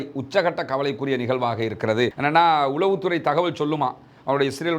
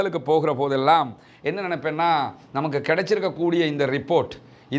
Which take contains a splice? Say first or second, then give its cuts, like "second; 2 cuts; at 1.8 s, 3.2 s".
first; 1 cut; at 2.1 s